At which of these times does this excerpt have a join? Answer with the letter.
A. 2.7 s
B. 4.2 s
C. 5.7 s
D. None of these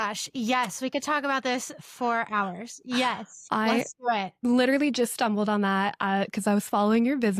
D